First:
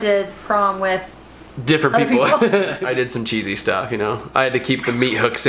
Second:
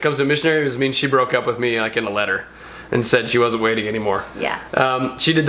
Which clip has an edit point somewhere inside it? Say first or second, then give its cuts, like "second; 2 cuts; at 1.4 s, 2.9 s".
first; 1 cut; at 2.8 s